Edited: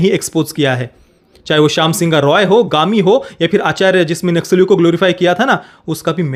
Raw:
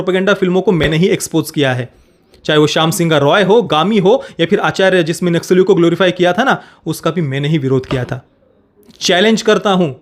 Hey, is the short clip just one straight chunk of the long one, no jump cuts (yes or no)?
yes